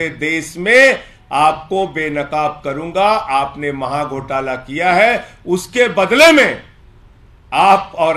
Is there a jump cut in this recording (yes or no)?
no